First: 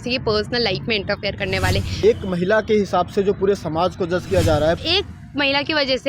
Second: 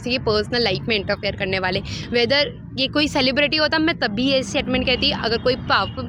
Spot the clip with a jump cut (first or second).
first